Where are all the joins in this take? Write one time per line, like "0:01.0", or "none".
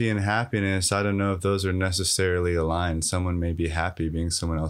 none